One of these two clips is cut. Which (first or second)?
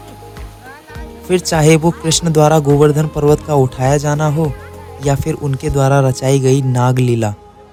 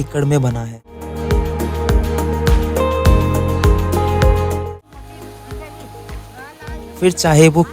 second